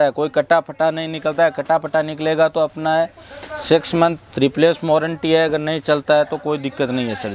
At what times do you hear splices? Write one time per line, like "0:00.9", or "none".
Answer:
none